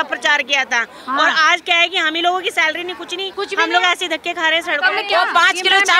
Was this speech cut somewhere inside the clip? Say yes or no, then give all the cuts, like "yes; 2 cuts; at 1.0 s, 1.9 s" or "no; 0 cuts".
yes; 2 cuts; at 3.2 s, 5.0 s